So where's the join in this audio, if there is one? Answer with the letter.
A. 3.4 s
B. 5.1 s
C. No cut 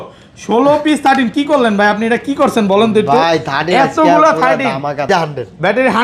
B